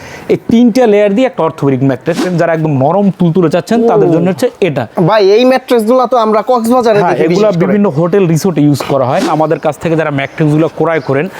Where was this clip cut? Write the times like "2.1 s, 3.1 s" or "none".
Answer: 2.2 s, 9.3 s